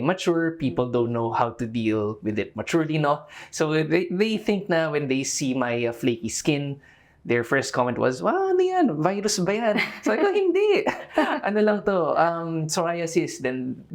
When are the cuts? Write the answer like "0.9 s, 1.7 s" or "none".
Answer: none